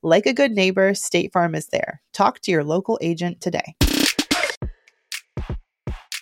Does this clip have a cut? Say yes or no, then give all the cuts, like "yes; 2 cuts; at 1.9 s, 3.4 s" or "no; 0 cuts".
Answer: yes; 1 cut; at 4.8 s